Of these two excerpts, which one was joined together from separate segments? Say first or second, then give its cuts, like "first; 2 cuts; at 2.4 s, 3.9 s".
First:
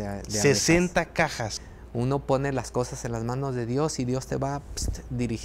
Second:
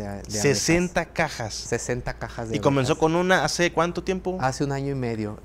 first; 1 cut; at 1.5 s